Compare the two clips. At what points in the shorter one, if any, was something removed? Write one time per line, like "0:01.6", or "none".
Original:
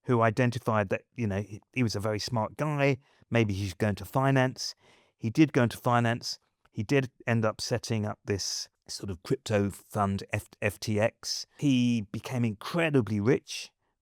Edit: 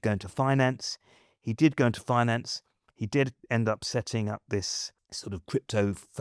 none